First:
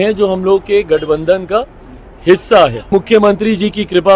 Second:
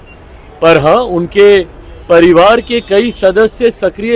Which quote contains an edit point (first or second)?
first